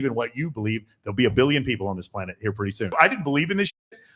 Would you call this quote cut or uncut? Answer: cut